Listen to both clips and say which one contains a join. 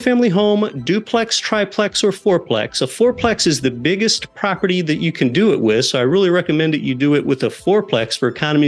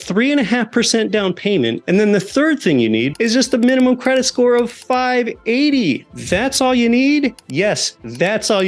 second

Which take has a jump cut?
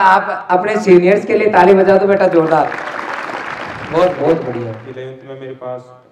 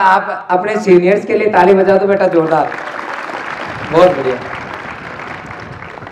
first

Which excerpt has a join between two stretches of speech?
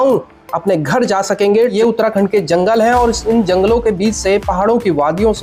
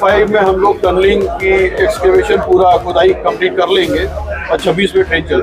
first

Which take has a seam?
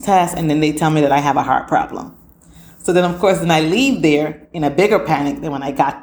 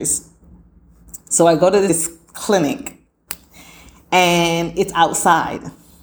second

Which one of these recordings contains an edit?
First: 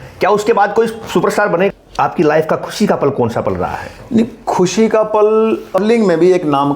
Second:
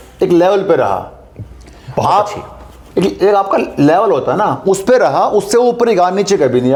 first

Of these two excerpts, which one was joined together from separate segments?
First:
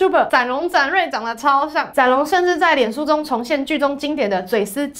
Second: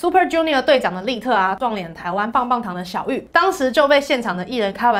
second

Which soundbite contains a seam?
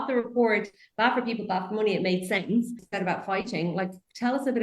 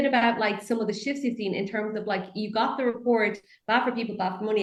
first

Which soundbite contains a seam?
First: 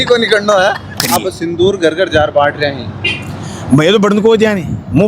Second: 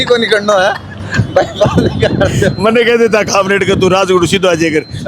first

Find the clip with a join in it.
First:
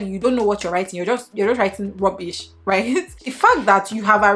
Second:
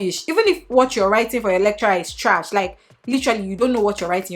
first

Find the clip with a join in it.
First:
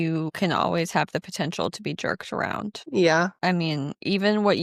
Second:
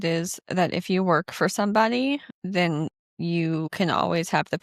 second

